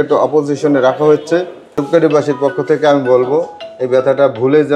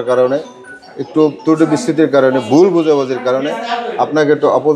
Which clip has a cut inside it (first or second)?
first